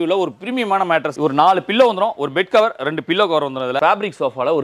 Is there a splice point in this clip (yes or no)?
yes